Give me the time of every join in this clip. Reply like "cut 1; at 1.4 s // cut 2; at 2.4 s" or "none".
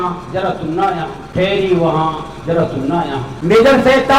cut 1; at 1.2 s // cut 2; at 3.3 s